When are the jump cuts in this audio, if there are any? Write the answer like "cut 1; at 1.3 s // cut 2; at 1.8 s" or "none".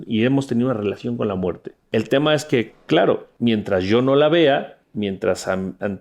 cut 1; at 1.7 s // cut 2; at 3.3 s // cut 3; at 4.8 s